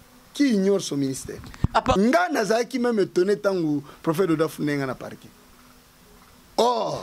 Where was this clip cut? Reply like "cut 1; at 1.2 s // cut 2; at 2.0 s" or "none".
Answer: cut 1; at 2.0 s